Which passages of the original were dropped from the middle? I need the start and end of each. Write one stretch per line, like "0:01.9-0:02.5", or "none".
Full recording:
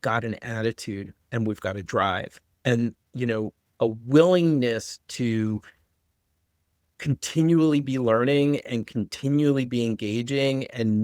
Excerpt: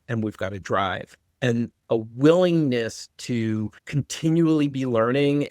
0:03.0-0:03.7
0:05.7-0:06.9